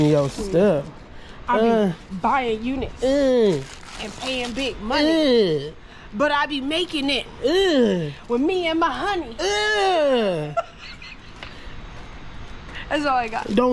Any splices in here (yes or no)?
no